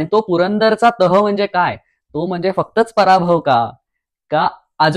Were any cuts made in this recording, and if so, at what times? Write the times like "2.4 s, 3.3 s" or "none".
none